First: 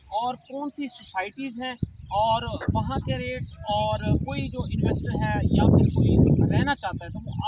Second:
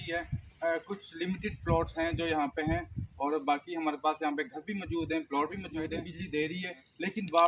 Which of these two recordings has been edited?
second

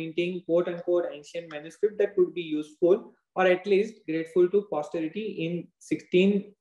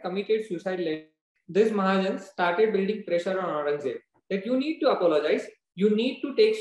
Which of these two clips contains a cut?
second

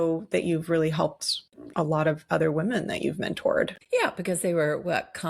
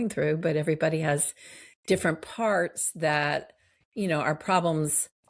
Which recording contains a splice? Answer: first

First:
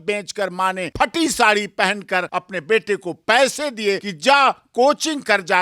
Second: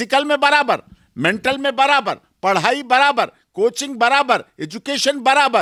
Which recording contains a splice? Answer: first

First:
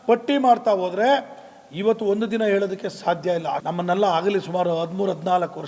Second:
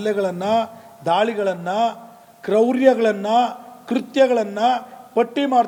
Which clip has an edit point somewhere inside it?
first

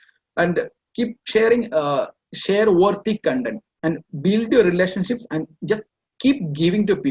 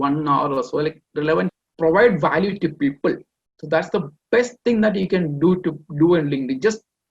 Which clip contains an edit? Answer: second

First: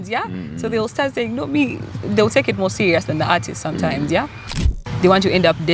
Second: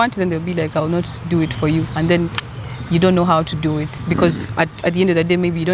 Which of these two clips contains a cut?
first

